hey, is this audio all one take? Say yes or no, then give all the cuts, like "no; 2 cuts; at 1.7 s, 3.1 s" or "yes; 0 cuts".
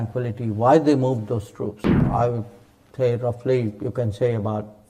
no; 1 cut; at 2.1 s